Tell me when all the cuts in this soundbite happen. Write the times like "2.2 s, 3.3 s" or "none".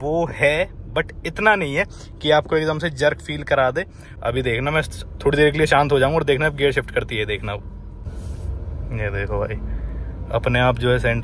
4.0 s, 8.0 s

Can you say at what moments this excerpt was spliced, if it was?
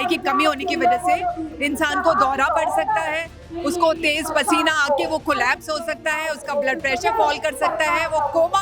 none

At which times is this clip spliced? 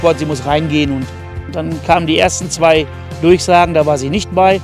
1.4 s

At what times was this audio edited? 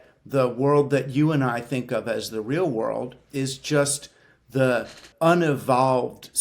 5.1 s

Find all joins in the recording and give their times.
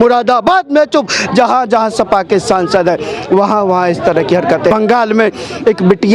4.7 s

